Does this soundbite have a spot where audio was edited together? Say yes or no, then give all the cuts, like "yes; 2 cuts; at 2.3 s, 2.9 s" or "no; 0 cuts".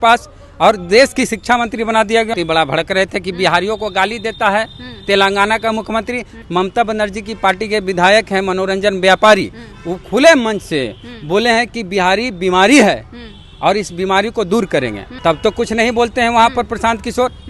yes; 3 cuts; at 2.3 s, 6.3 s, 15.1 s